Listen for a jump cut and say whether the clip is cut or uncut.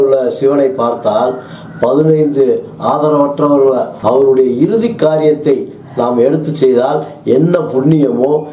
cut